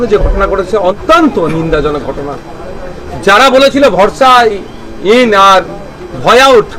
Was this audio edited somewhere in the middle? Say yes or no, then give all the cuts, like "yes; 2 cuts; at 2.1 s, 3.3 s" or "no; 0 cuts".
yes; 1 cut; at 1.0 s